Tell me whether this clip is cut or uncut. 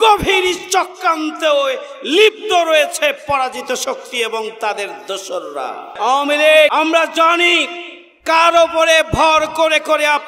cut